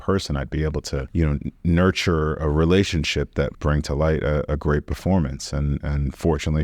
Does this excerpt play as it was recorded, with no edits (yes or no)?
no